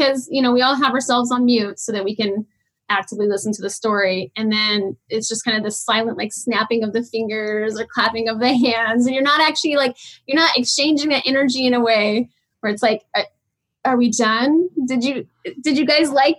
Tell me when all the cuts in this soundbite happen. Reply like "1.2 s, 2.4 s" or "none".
none